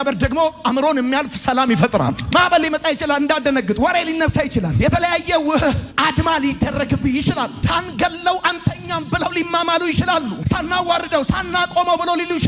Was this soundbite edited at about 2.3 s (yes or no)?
yes